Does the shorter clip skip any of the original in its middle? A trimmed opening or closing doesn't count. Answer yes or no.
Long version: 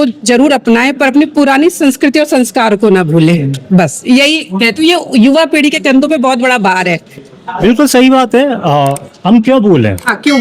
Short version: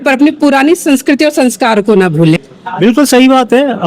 yes